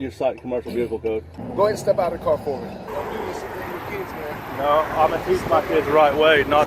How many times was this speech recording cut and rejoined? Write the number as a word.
two